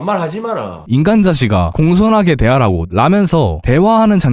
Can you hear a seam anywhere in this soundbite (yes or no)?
yes